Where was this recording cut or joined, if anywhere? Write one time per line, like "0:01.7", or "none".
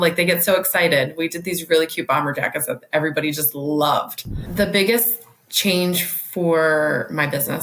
0:04.4